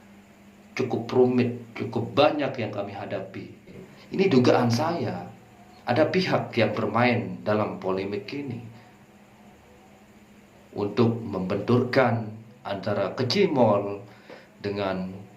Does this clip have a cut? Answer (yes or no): yes